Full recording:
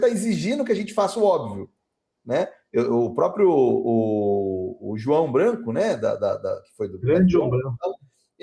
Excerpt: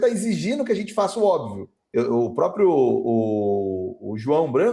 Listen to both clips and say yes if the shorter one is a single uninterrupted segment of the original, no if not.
no